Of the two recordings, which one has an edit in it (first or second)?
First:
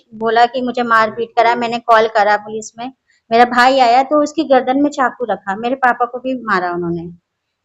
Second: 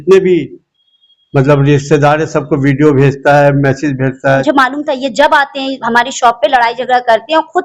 second